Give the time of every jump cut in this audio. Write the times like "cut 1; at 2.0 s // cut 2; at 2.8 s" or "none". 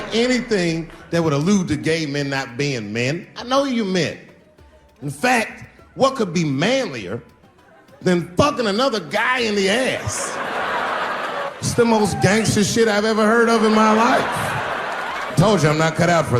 cut 1; at 11.5 s // cut 2; at 15.3 s

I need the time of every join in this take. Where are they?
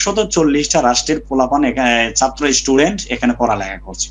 none

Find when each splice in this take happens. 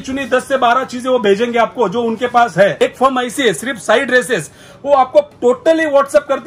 cut 1; at 2.8 s

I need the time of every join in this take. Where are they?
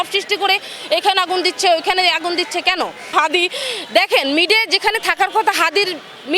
cut 1; at 3.1 s

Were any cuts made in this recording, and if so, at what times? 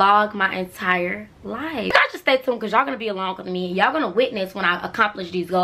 cut 1; at 1.9 s

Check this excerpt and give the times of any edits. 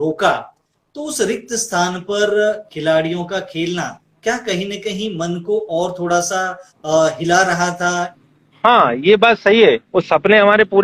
cut 1; at 8.1 s // cut 2; at 9.8 s

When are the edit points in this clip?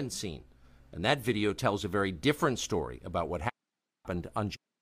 cut 1; at 3.5 s

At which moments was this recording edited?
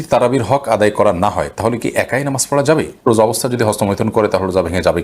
cut 1; at 3.1 s

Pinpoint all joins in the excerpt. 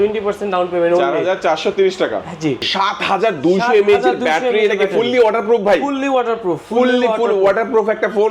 cut 1; at 2.7 s

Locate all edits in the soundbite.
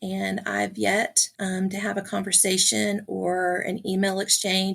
cut 1; at 1.2 s

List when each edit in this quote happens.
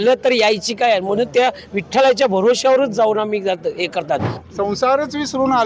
cut 1; at 4.3 s

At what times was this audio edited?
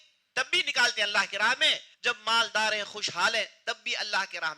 cut 1; at 1.9 s

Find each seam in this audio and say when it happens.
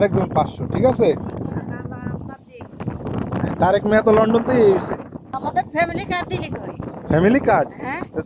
cut 1; at 2.8 s // cut 2; at 5.2 s

